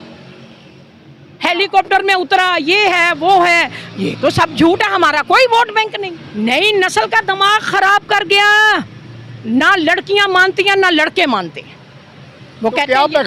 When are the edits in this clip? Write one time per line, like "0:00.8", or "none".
0:05.9